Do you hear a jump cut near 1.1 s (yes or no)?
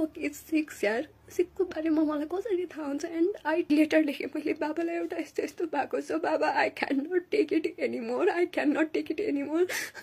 no